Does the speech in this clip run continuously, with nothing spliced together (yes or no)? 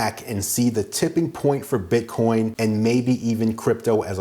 no